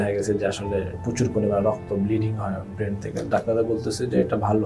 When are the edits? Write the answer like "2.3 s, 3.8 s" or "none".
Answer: none